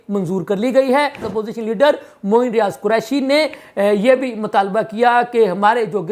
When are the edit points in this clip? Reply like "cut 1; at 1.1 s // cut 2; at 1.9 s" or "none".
cut 1; at 1.3 s

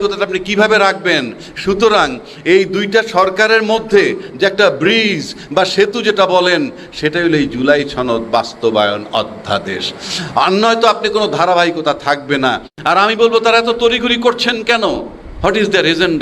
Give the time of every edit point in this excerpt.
cut 1; at 12.7 s

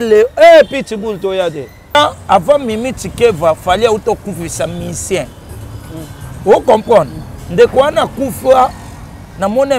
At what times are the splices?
cut 1; at 2.0 s

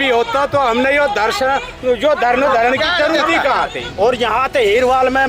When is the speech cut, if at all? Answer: cut 1; at 3.8 s

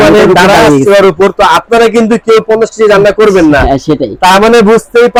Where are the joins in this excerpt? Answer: none

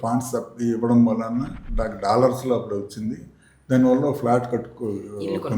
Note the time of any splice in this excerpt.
none

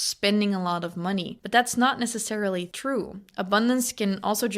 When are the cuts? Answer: cut 1; at 1.3 s // cut 2; at 2.7 s

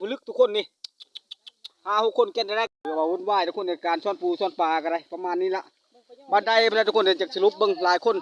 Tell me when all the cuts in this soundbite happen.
cut 1; at 2.7 s

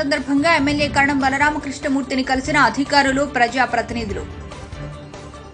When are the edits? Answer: none

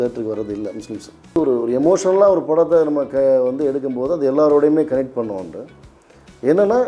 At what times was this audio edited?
cut 1; at 1.4 s

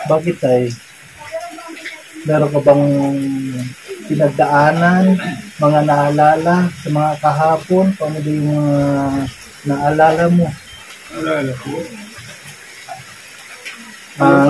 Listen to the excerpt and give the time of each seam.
cut 1; at 11.2 s

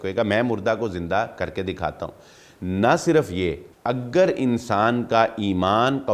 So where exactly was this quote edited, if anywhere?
cut 1; at 3.7 s

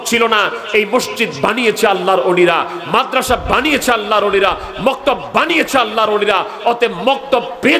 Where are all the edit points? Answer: none

